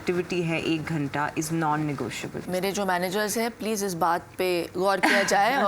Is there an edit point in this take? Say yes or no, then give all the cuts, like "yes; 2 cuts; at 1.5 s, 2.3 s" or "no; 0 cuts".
yes; 1 cut; at 2.4 s